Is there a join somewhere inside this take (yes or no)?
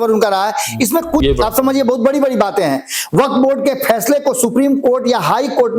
yes